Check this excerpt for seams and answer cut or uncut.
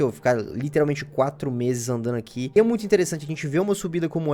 cut